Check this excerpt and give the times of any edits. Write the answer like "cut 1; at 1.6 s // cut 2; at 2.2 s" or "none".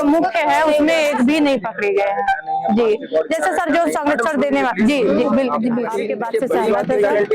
cut 1; at 5.9 s